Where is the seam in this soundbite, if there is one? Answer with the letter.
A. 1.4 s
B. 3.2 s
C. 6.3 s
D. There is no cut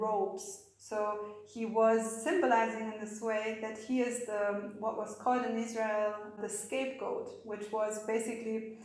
C